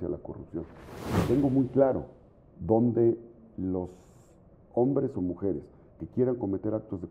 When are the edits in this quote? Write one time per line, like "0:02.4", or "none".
0:01.2